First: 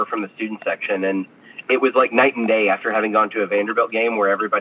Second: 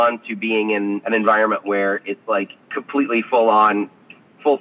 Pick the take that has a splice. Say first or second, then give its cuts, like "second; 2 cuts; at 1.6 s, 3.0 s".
second; 2 cuts; at 1.0 s, 2.8 s